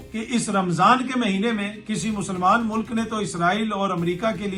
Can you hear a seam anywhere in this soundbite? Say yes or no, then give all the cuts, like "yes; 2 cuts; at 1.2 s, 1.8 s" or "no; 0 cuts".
no; 0 cuts